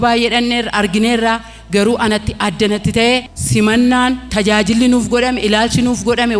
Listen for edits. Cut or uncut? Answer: cut